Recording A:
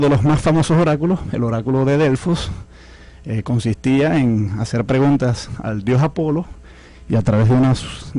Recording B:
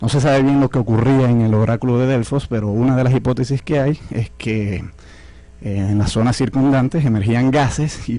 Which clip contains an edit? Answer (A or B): B